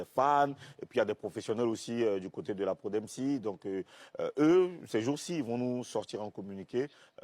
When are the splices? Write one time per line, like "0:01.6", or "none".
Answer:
0:02.9